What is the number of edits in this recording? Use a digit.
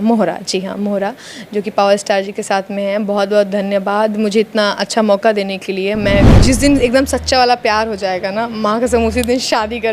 1